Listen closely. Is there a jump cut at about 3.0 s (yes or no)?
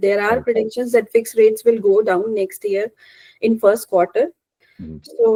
no